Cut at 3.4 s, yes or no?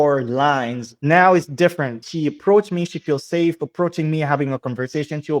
no